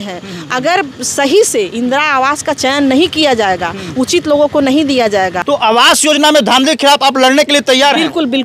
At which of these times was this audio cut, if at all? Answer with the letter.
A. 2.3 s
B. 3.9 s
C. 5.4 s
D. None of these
C